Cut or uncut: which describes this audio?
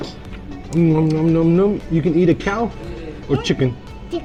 uncut